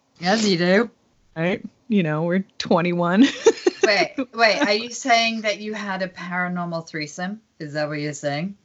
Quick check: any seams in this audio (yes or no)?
no